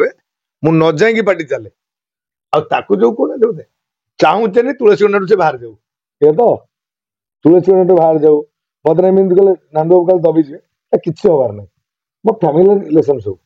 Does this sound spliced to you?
no; 0 cuts

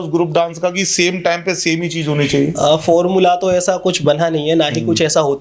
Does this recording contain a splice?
no; 0 cuts

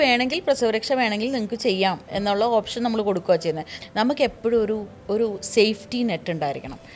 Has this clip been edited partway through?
yes; 1 cut; at 3.7 s

